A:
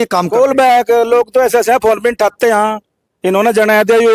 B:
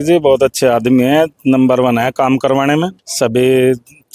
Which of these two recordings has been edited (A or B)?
B